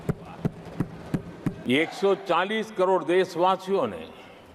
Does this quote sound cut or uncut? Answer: cut